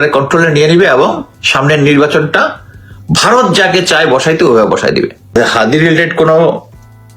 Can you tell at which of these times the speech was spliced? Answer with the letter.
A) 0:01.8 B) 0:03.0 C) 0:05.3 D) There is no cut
C